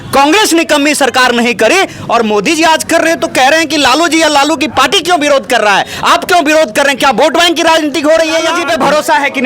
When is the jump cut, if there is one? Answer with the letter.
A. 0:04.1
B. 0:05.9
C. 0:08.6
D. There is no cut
C